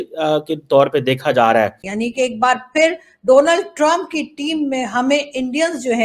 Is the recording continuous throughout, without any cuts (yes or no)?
no